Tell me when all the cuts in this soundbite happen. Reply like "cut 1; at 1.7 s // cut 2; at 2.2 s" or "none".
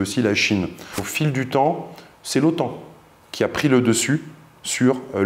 cut 1; at 1.1 s